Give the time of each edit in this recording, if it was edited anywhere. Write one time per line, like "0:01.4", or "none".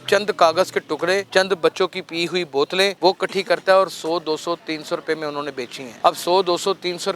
0:01.3
0:03.0
0:05.8